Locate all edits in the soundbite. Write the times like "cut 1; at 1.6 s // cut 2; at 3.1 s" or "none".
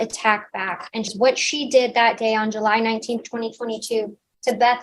cut 1; at 1.1 s